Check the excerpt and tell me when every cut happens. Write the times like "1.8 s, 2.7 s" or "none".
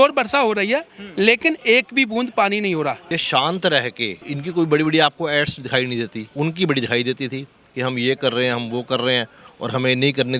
3.1 s, 4.2 s, 6.2 s

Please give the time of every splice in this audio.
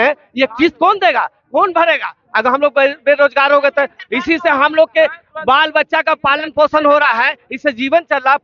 none

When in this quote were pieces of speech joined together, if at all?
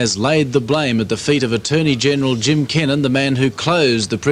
none

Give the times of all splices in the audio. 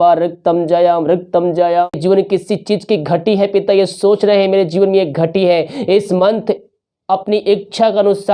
2.0 s

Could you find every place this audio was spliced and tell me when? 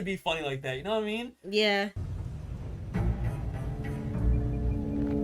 2.1 s

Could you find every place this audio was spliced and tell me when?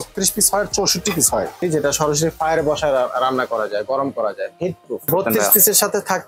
1.6 s, 5.1 s

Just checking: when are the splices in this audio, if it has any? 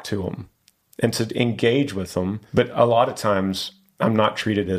2.4 s

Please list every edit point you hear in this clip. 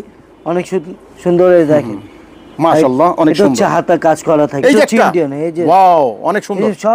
4.6 s

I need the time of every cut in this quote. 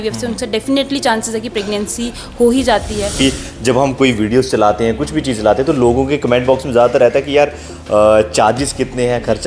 3.2 s

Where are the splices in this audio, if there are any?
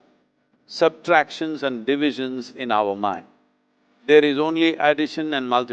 none

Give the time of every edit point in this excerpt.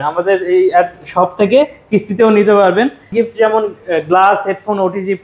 3.0 s

